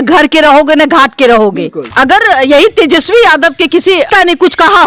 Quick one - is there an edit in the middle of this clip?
yes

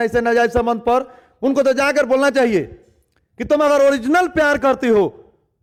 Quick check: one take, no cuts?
yes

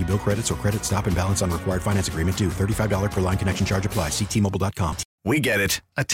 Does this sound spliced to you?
yes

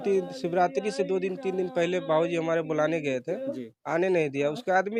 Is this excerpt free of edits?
yes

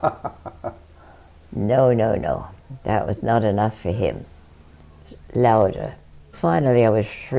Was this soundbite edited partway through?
yes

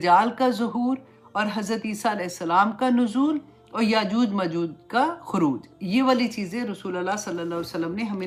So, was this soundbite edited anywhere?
no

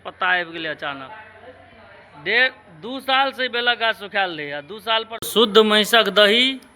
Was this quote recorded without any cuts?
no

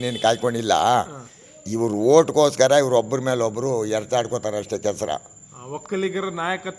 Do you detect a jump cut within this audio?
no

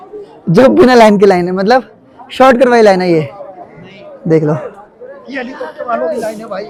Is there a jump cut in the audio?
no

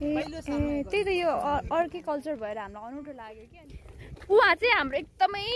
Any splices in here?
yes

